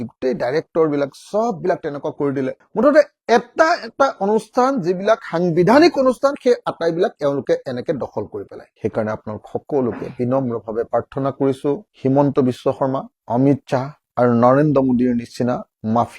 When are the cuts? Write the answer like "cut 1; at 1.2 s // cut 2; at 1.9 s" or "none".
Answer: cut 1; at 8.7 s // cut 2; at 11.9 s